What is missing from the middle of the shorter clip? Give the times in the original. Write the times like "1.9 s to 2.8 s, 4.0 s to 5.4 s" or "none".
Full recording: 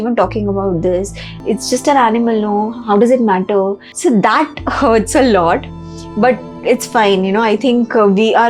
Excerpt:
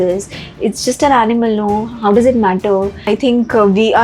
3.9 s to 7.5 s